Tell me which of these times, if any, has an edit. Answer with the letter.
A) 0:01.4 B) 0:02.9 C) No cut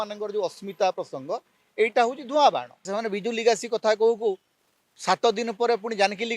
B